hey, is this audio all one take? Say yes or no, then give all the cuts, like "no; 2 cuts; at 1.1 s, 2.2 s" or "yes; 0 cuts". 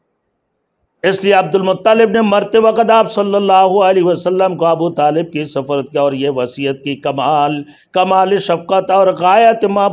yes; 0 cuts